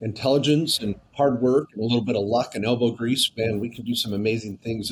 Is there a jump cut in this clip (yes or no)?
no